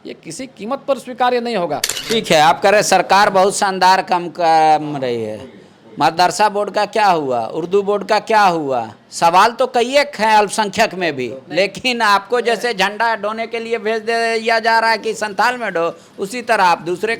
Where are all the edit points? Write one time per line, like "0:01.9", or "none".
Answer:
0:01.9